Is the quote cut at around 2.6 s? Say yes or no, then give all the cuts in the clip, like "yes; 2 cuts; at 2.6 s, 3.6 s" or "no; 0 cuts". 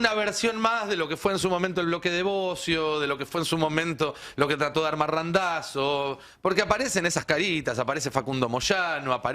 no; 0 cuts